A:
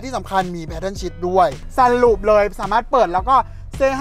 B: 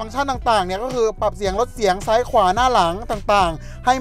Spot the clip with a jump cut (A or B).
A